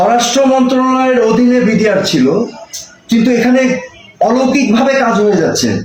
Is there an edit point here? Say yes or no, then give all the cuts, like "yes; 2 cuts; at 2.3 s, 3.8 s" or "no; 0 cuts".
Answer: no; 0 cuts